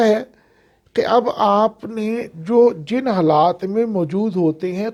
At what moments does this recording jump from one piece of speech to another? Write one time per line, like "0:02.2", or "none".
none